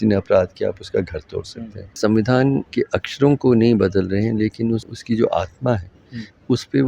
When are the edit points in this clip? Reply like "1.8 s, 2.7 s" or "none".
2.0 s, 2.7 s, 4.9 s